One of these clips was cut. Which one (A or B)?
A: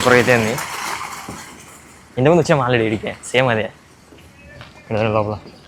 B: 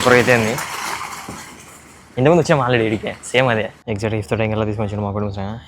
B